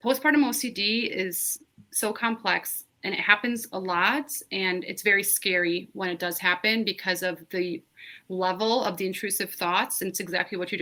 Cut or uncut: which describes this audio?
uncut